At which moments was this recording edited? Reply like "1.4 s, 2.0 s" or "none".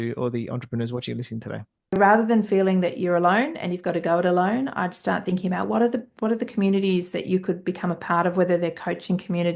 2.0 s